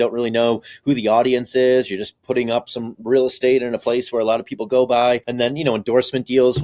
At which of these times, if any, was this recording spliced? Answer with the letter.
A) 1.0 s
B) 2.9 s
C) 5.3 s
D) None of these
C